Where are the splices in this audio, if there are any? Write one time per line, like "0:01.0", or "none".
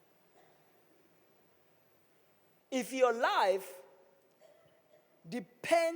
0:02.6